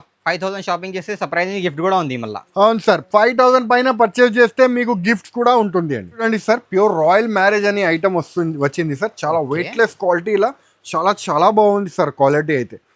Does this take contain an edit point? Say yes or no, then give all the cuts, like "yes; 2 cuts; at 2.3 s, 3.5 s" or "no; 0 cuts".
no; 0 cuts